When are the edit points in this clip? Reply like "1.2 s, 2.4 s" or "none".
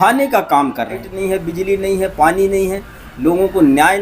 1.1 s